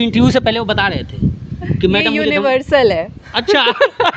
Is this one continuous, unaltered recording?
yes; 0 cuts

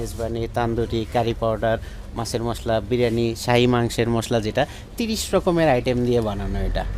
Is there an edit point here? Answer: no; 0 cuts

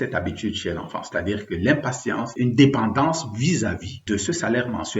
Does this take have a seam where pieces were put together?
yes; 2 cuts; at 2.3 s, 3.9 s

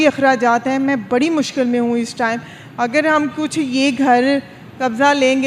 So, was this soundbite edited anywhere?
no; 0 cuts

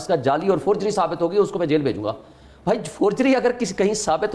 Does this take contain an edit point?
no; 0 cuts

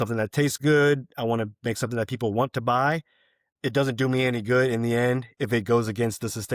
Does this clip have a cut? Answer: yes; 1 cut; at 5.3 s

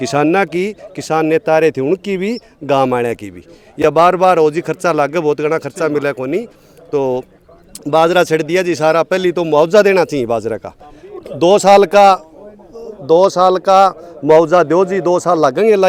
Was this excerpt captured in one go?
yes; 0 cuts

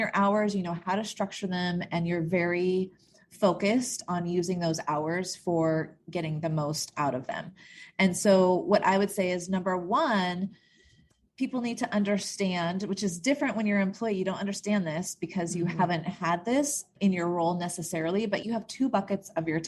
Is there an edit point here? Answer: yes; 1 cut; at 18.4 s

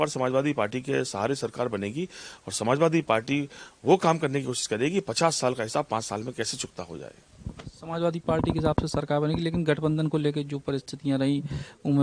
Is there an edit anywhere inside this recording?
no; 0 cuts

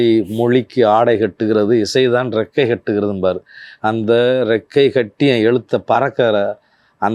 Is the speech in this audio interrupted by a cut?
no; 0 cuts

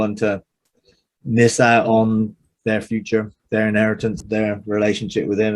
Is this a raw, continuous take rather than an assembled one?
no; 2 cuts; at 2.5 s, 4.2 s

